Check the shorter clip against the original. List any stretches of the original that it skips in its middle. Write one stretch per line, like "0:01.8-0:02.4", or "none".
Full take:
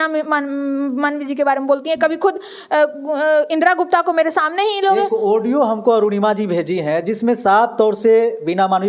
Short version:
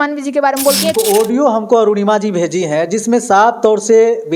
0:02.0-0:05.1